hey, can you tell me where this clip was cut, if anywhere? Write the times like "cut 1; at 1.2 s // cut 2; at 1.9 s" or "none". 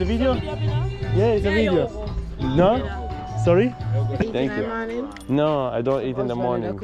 cut 1; at 4.2 s